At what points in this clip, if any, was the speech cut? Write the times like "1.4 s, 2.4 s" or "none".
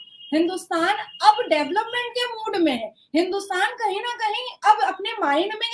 none